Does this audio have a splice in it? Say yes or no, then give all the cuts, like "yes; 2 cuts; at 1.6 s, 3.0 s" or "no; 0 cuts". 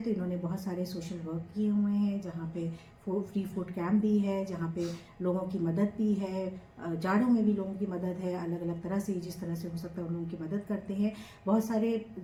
no; 0 cuts